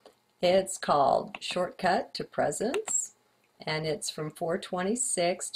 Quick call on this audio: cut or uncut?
uncut